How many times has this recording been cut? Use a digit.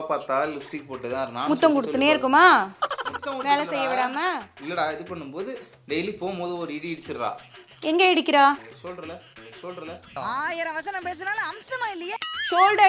0